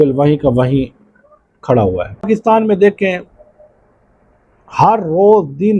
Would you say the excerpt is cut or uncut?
cut